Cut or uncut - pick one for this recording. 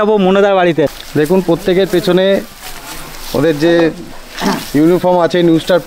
cut